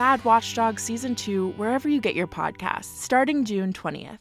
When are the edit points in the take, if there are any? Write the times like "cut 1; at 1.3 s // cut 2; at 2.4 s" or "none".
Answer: cut 1; at 2.9 s